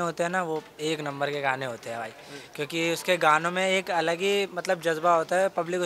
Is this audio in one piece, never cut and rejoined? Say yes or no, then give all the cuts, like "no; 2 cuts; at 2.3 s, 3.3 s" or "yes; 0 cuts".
yes; 0 cuts